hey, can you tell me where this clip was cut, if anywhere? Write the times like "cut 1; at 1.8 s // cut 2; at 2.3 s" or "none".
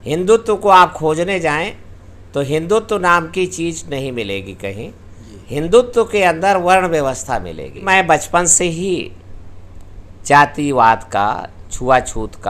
cut 1; at 7.8 s

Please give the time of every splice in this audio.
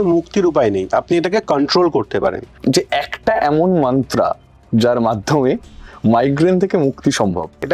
cut 1; at 2.5 s

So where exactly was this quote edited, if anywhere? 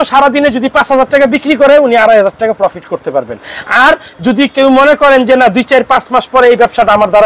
none

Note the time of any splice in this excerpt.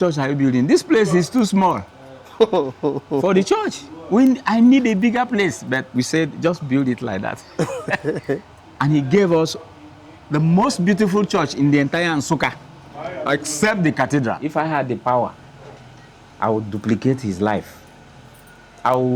cut 1; at 14.4 s

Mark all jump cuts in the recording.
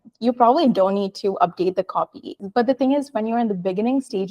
cut 1; at 2.4 s

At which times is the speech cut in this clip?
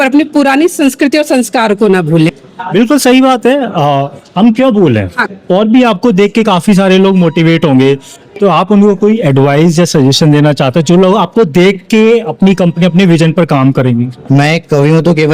cut 1; at 2.3 s // cut 2; at 5.2 s

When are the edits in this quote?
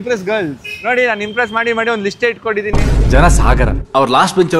none

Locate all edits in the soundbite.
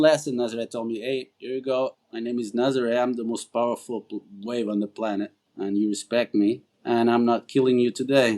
cut 1; at 1.3 s // cut 2; at 2.0 s // cut 3; at 5.4 s // cut 4; at 6.7 s

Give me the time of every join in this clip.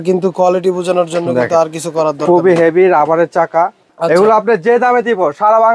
cut 1; at 3.9 s

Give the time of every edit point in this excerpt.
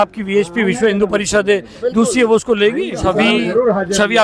cut 1; at 3.0 s

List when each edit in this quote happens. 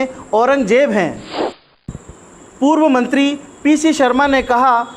cut 1; at 1.5 s

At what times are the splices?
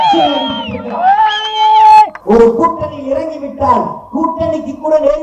cut 1; at 2.2 s

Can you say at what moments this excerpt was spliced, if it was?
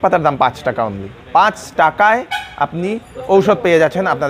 none

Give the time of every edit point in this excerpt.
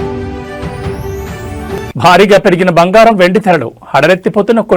cut 1; at 1.8 s

